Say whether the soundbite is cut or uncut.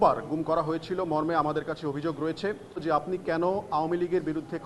cut